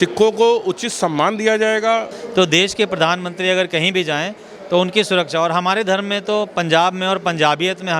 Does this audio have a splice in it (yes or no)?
yes